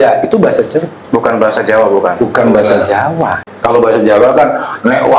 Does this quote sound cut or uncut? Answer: cut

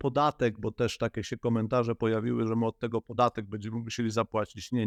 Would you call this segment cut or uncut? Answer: uncut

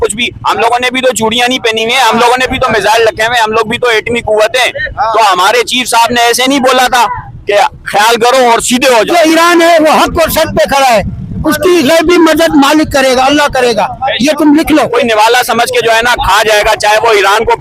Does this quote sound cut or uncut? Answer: cut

